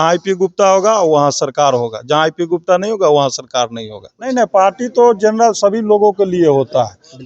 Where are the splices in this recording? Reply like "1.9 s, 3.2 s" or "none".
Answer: 4.2 s